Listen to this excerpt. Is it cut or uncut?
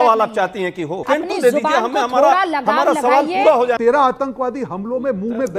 cut